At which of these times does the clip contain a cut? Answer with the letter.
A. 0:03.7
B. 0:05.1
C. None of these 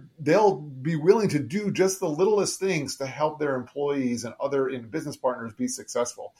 C